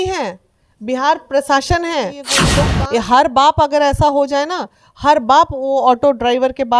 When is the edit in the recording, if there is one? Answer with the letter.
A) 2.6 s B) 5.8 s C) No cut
A